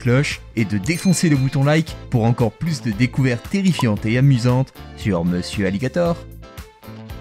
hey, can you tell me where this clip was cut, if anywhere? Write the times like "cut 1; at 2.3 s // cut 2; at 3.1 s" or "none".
cut 1; at 6.1 s